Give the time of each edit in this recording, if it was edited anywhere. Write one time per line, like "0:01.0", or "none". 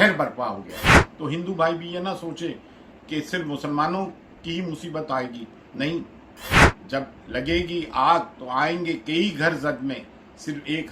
0:01.0